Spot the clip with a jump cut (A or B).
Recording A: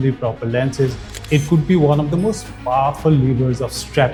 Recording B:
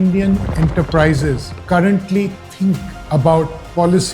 B